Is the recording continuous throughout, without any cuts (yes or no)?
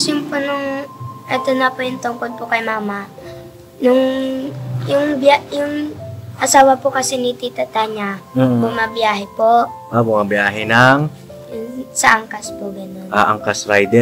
yes